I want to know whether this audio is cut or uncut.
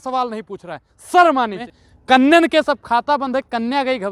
cut